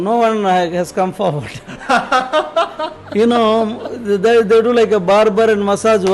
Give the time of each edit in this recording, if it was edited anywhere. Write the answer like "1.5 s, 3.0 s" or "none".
none